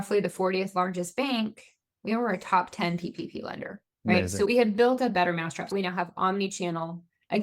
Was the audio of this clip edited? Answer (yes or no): yes